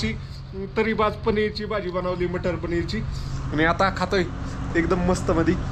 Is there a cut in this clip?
no; 0 cuts

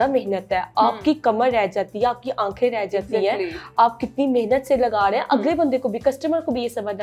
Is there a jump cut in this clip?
no; 0 cuts

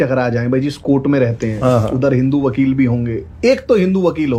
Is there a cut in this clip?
no; 0 cuts

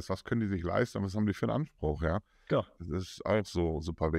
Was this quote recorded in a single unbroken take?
yes; 0 cuts

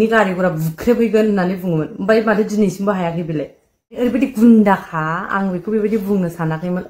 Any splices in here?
yes; 1 cut; at 4.0 s

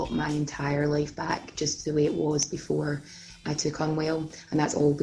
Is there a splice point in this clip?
yes; 1 cut; at 3.4 s

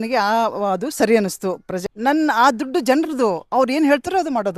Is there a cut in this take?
yes; 1 cut; at 1.7 s

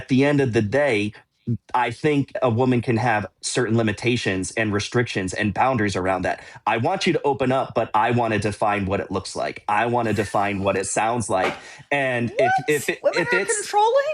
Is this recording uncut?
no; 1 cut; at 2.3 s

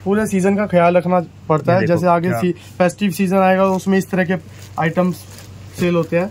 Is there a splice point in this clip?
no; 0 cuts

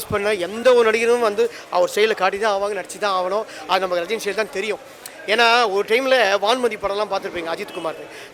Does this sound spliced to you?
no; 0 cuts

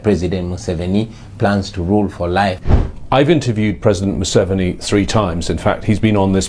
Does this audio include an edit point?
yes; 1 cut; at 2.7 s

